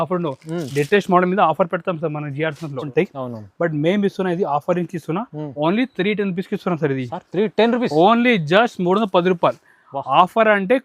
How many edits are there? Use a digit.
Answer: 1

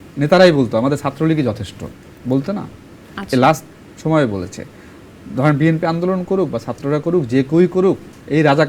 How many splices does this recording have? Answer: 0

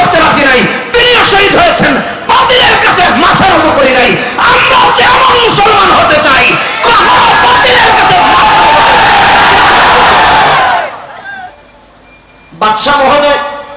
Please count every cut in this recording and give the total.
1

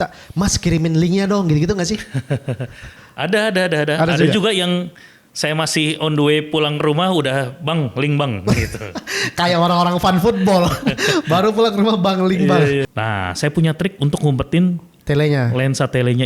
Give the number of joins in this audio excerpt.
1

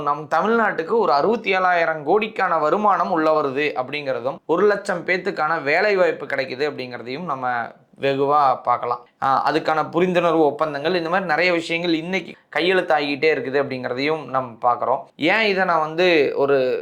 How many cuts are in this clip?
0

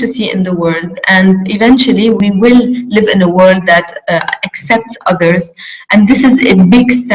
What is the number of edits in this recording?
1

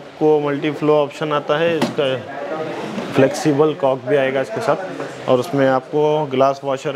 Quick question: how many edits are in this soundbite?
0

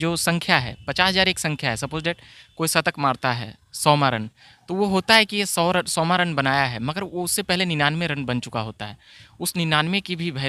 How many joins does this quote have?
0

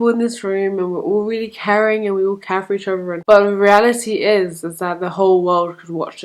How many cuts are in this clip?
1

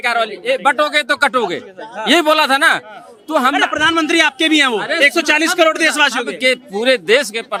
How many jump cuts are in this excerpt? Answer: 0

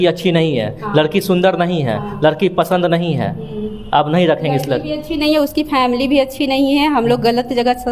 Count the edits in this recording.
0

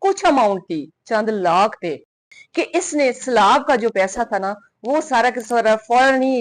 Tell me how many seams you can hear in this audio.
1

